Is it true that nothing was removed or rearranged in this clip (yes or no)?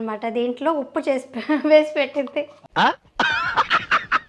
yes